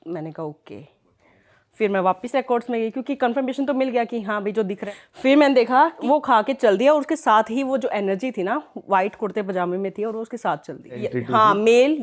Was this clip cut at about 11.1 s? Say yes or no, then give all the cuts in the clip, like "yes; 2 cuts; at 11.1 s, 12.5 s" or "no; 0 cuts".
yes; 3 cuts; at 4.8 s, 6.0 s, 11.1 s